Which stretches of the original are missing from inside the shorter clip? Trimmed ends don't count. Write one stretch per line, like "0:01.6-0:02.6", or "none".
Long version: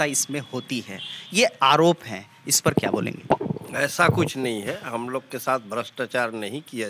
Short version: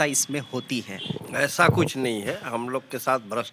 0:01.2-0:03.6